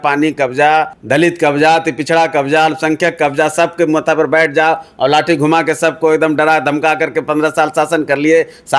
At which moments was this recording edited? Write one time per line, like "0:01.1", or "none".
0:01.0